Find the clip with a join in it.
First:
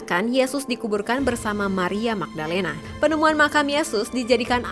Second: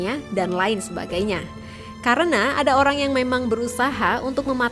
first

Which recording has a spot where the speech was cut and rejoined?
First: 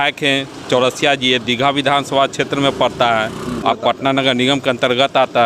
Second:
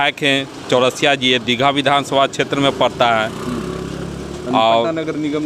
first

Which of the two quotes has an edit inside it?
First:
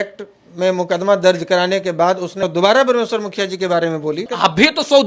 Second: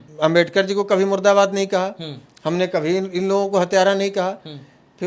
first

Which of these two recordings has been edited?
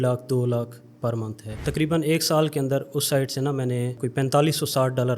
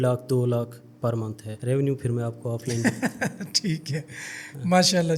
first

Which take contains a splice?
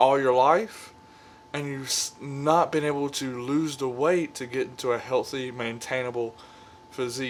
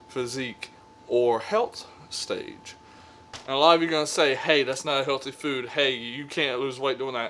second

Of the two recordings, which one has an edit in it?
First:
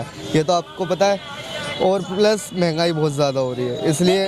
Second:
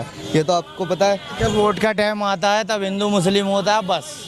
second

